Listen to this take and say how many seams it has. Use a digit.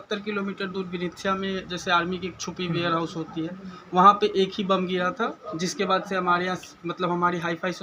0